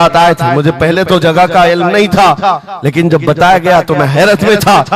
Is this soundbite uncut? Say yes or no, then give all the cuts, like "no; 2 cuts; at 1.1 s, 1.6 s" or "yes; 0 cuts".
yes; 0 cuts